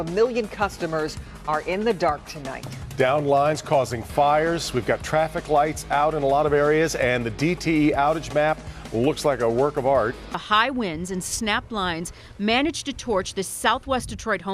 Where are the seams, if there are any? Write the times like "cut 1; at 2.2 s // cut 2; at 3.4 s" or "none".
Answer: cut 1; at 10.4 s